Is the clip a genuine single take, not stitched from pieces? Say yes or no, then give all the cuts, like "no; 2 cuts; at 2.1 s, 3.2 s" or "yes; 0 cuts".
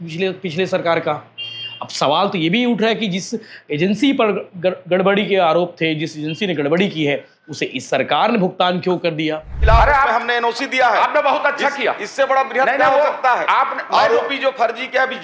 no; 1 cut; at 9.5 s